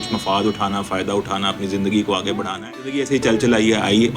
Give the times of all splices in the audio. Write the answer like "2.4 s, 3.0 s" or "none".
3.0 s